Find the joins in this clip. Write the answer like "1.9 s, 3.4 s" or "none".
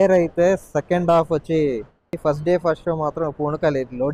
2.2 s